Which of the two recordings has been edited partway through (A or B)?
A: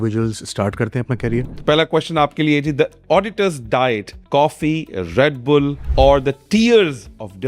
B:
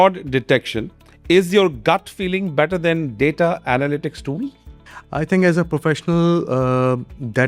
A